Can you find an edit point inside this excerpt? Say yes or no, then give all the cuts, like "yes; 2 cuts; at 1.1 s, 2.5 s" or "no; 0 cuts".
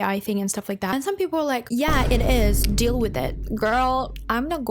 no; 0 cuts